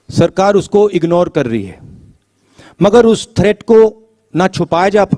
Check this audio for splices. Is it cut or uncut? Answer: uncut